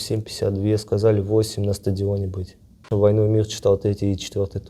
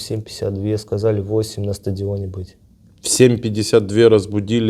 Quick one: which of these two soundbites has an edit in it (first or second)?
first